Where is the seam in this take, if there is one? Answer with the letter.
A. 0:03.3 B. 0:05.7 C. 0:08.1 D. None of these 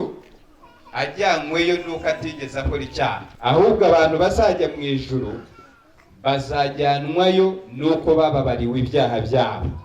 A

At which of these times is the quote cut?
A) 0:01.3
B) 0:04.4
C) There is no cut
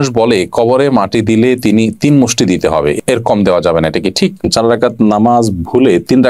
B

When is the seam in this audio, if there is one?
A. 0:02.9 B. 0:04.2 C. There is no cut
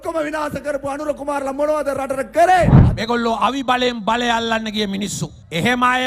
A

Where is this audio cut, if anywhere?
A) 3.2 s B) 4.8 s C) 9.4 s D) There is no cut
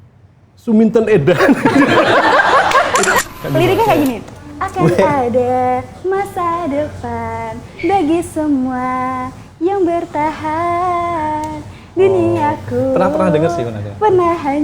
A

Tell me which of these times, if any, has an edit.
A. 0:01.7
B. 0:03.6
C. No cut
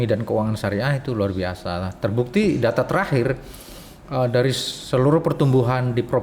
C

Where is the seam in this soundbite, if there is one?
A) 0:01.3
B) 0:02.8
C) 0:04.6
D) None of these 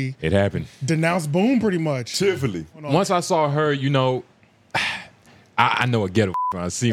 B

